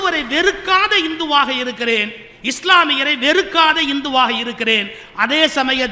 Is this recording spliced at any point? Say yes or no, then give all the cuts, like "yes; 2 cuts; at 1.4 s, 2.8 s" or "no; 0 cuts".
no; 0 cuts